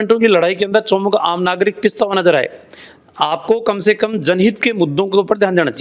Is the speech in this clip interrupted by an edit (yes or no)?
no